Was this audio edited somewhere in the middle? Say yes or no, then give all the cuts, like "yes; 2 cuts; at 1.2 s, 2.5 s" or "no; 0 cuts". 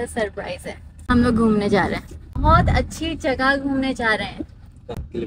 yes; 2 cuts; at 1.0 s, 2.4 s